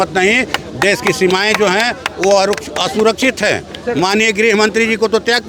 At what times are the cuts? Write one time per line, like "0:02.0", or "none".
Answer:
none